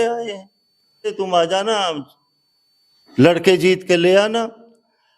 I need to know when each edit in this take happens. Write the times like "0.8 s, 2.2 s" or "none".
1.1 s